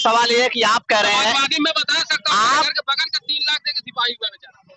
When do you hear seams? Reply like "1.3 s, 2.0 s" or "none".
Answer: none

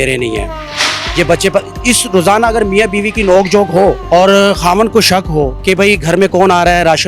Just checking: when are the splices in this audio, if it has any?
4.0 s, 5.6 s

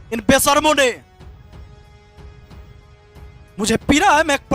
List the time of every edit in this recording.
1.0 s, 3.5 s

